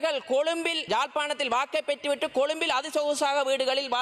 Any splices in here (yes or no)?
no